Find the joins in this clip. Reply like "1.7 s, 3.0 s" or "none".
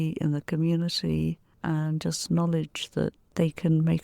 none